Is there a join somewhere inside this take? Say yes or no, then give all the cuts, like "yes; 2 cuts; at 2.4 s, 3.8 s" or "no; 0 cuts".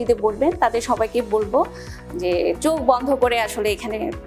no; 0 cuts